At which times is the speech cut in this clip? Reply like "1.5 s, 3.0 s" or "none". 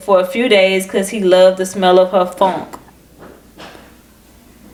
none